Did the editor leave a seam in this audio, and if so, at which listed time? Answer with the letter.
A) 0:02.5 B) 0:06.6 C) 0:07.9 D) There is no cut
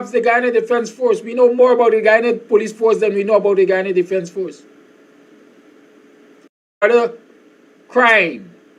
B